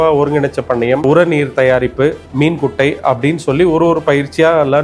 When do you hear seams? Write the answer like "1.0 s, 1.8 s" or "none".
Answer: 1.0 s, 2.2 s